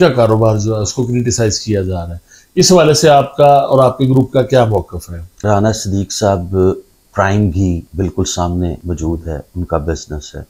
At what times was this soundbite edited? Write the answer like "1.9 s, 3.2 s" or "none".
5.4 s, 7.9 s, 8.8 s